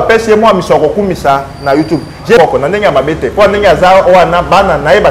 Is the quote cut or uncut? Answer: cut